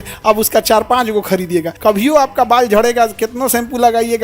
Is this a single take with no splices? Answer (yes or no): no